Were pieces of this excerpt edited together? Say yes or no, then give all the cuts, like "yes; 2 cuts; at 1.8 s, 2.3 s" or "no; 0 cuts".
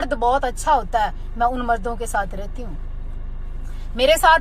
no; 0 cuts